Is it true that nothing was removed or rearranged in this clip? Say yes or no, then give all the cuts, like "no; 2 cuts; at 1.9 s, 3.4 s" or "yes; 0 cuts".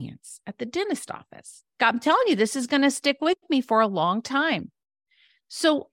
no; 1 cut; at 1.8 s